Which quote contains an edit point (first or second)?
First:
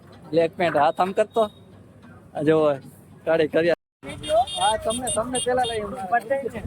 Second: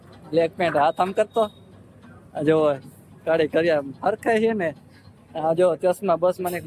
first